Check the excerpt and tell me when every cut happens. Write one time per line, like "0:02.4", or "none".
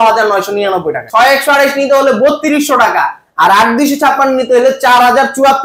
0:01.0